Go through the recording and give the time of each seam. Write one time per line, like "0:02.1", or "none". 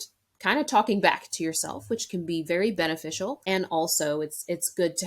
0:03.4